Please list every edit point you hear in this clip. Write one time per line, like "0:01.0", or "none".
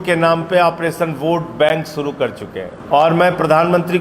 0:02.7